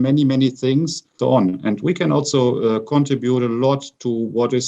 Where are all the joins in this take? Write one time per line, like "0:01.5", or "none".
none